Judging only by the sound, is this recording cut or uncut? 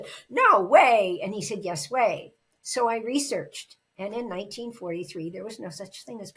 uncut